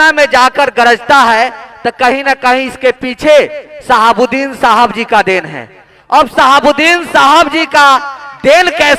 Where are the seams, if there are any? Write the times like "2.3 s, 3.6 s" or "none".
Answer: none